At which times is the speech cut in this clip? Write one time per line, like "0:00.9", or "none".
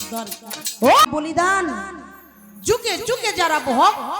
0:01.0